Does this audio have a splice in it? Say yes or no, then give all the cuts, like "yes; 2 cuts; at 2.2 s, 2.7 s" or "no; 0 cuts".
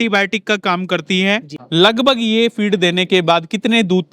yes; 1 cut; at 1.6 s